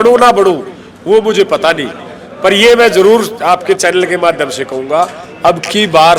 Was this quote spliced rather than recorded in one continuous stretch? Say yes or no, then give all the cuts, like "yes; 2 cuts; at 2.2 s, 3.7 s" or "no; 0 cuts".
no; 0 cuts